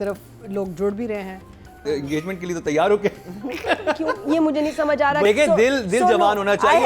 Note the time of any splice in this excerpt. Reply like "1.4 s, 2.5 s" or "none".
1.8 s, 5.2 s

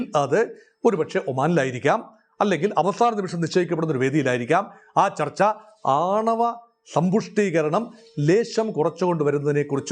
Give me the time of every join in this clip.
none

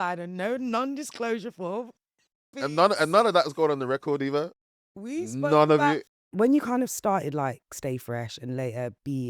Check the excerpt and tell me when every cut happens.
2.6 s, 6.2 s

